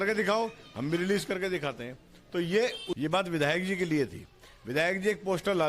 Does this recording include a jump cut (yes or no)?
yes